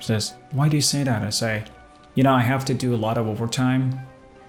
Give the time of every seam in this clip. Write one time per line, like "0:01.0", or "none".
none